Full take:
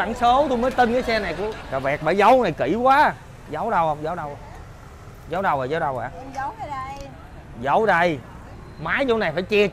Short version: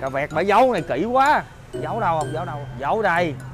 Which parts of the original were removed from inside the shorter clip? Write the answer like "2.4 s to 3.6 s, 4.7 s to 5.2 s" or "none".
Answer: 4.3 s to 7.5 s

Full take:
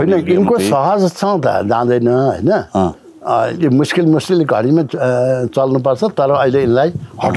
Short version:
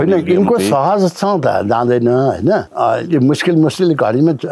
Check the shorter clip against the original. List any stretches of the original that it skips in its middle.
2.7 s to 3.2 s

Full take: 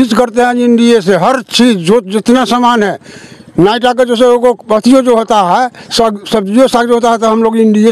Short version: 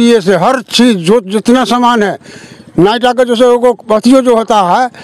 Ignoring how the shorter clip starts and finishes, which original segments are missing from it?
none

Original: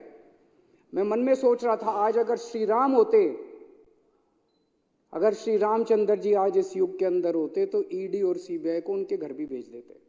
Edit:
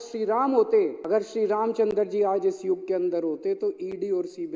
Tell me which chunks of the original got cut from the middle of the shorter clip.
3.4 s to 5.1 s

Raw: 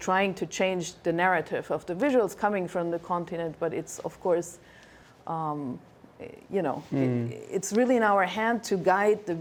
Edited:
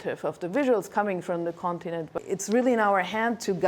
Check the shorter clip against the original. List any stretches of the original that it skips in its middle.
3.6 s to 7.3 s

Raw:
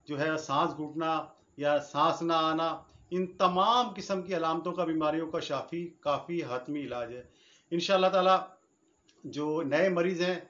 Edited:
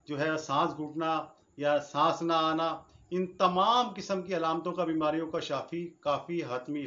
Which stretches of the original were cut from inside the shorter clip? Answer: none

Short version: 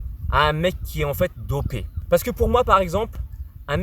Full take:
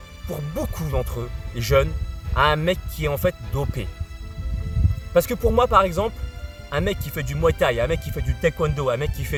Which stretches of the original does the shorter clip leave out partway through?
3.9 s to 4.9 s

